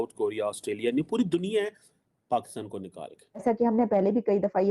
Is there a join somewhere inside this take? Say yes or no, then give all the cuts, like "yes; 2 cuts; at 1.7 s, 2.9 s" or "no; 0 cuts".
yes; 1 cut; at 3.4 s